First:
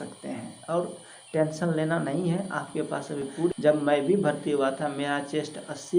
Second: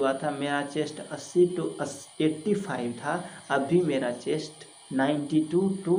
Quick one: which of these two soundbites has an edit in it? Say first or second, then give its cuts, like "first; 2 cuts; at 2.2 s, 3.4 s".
first; 1 cut; at 3.5 s